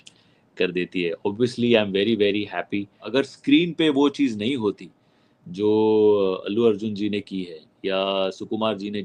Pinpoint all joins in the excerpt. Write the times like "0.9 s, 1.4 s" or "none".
3.0 s

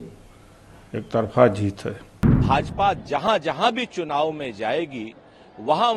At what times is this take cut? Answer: 2.4 s

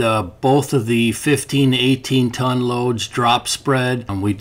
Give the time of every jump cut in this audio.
none

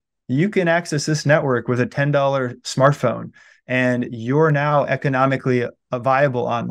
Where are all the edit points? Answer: none

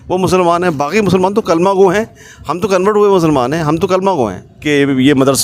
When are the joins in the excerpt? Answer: 4.5 s

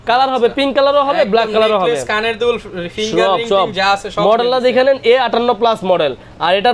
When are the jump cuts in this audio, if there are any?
none

